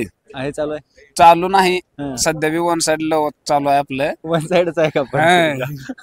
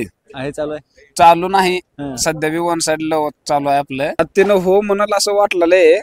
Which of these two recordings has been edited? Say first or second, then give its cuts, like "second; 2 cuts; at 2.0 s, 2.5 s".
second; 1 cut; at 4.1 s